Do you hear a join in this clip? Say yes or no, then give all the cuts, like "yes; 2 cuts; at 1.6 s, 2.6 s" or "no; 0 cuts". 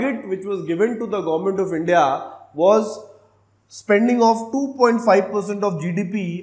no; 0 cuts